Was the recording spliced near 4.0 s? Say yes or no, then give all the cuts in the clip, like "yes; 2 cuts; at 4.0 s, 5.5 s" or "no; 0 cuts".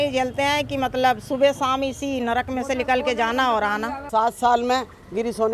yes; 1 cut; at 4.0 s